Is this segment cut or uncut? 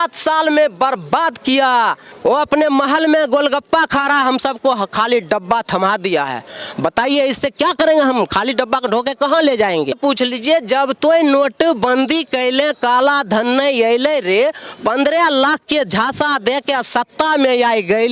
cut